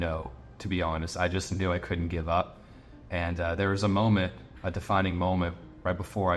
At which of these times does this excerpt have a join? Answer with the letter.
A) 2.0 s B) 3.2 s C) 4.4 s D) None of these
D